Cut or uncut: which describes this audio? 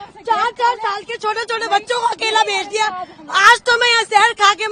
uncut